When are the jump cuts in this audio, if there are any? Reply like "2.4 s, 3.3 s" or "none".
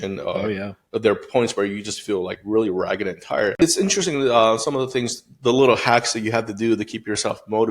3.6 s